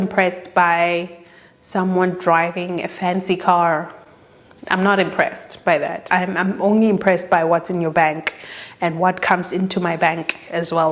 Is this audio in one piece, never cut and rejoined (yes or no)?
yes